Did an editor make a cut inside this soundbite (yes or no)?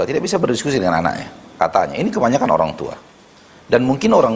yes